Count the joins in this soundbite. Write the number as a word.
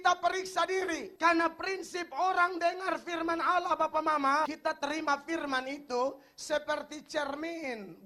two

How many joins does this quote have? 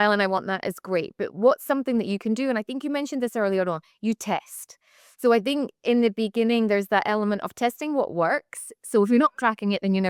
zero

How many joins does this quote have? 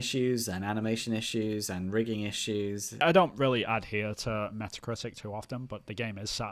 one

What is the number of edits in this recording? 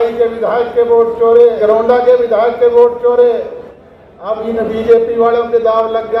two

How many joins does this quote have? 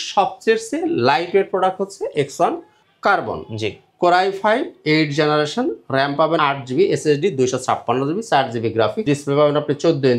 two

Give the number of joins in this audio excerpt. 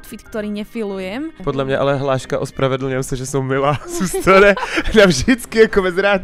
one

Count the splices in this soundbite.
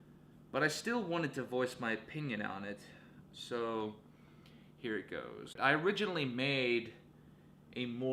zero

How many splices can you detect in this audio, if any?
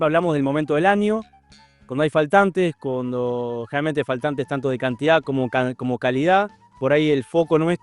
one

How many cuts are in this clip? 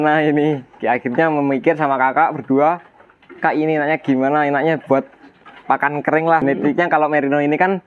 one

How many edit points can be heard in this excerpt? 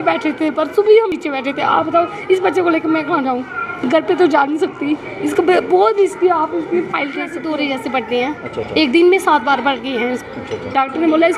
two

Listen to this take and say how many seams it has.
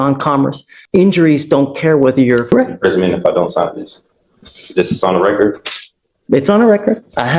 one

